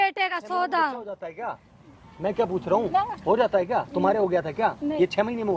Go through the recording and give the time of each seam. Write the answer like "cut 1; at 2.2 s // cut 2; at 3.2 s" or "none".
none